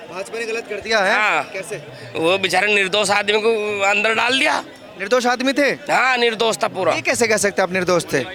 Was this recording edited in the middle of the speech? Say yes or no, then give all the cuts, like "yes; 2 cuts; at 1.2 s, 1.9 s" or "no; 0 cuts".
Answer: no; 0 cuts